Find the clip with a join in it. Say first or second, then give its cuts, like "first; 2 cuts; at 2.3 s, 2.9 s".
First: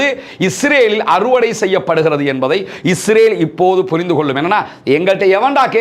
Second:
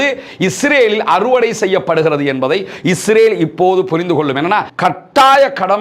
second; 1 cut; at 4.7 s